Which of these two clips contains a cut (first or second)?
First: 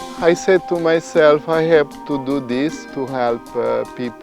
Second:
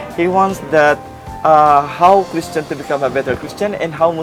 first